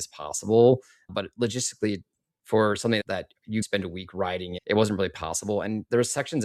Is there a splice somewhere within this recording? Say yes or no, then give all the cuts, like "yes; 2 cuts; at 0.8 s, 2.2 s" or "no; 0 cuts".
no; 0 cuts